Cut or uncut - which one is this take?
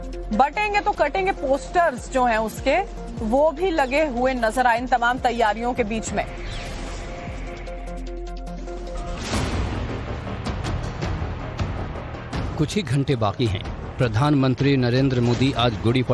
cut